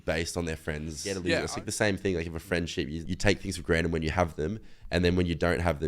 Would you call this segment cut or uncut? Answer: cut